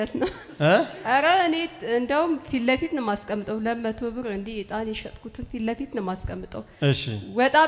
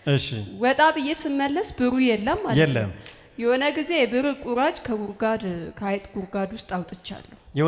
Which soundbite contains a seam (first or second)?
first